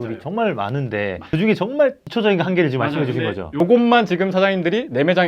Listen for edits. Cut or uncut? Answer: cut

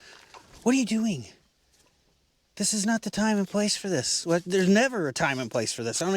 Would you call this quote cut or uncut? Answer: uncut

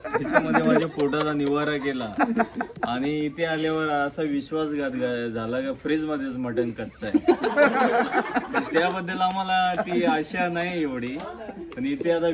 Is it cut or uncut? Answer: cut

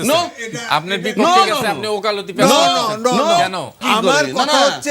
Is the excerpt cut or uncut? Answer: cut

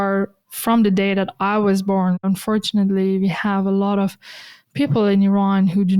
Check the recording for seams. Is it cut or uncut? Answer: cut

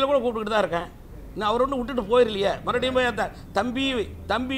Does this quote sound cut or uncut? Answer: uncut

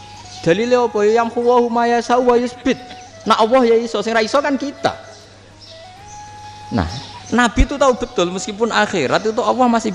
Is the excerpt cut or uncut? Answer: uncut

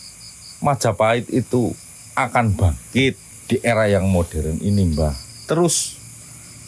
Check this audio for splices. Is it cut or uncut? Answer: cut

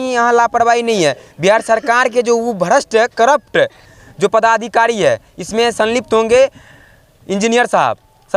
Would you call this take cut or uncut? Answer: uncut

